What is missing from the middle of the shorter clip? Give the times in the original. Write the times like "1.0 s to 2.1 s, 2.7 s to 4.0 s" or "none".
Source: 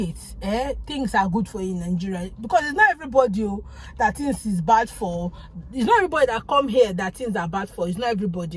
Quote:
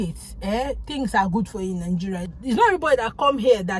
2.3 s to 5.6 s